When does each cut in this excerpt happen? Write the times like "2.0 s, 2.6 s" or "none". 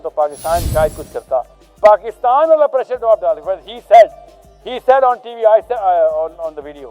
1.6 s